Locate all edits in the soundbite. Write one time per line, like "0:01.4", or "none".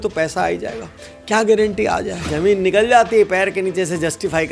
0:02.2